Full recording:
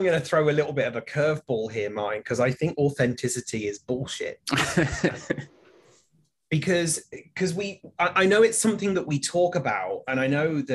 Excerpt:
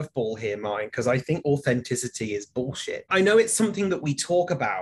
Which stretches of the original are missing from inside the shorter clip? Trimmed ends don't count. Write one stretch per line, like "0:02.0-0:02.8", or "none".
0:04.4-0:08.1